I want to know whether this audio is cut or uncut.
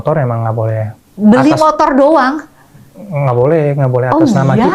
uncut